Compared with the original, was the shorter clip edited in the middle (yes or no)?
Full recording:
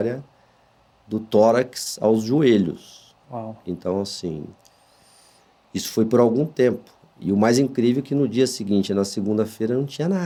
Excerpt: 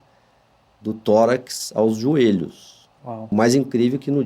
yes